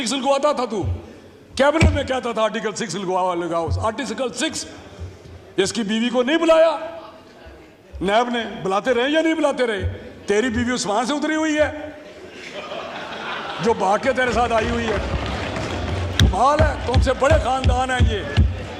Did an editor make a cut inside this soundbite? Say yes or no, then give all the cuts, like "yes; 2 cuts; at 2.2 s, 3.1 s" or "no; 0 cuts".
no; 0 cuts